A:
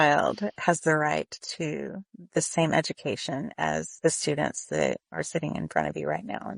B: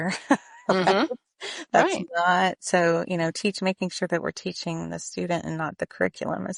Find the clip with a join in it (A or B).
A